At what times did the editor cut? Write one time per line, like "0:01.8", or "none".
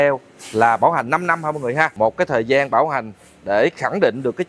0:01.9